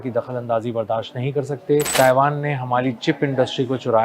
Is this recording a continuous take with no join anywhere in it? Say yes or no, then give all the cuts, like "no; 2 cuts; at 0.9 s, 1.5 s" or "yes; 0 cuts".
no; 1 cut; at 1.9 s